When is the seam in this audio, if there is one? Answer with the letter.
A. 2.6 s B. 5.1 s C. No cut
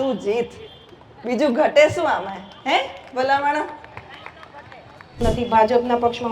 B